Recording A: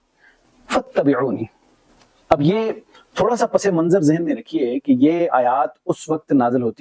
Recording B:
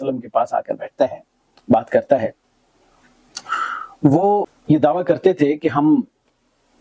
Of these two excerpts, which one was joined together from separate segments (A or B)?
B